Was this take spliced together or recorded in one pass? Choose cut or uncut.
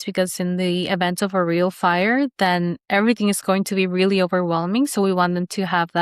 uncut